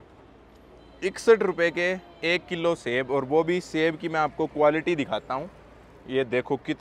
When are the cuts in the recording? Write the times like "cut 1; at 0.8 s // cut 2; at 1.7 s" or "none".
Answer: none